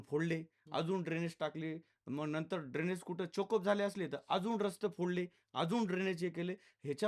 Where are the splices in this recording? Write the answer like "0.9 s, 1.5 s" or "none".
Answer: none